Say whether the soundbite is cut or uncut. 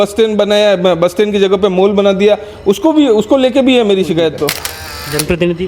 cut